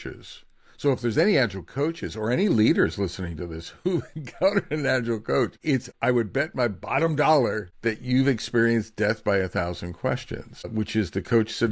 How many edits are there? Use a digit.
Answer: 3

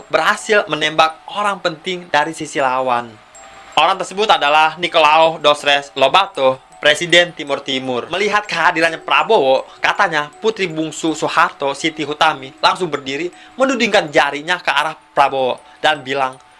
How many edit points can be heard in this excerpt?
1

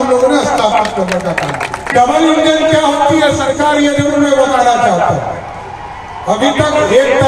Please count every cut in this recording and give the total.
1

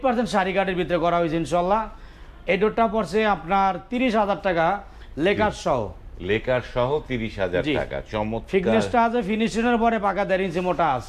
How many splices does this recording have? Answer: 0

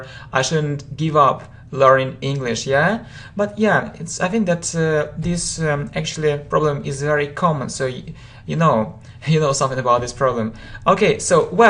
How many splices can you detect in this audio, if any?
0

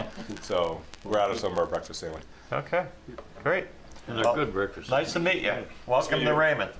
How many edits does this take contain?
1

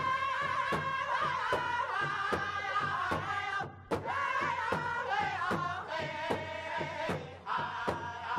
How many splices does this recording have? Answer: 0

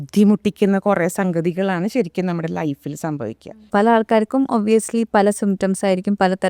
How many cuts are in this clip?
1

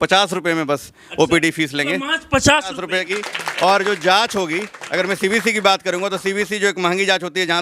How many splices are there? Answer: 1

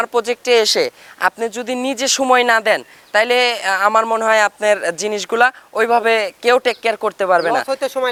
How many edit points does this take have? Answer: 0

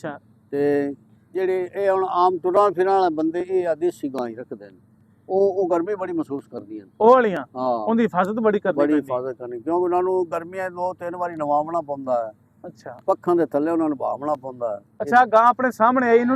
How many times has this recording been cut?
1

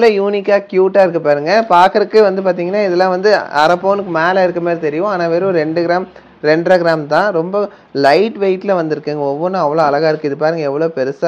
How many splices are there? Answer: 0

